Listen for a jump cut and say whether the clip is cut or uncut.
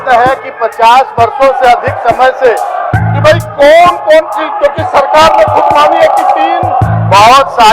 cut